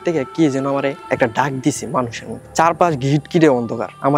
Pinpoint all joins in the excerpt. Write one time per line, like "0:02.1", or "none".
none